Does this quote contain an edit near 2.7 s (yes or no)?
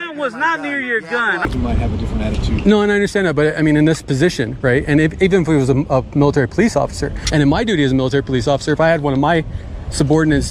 no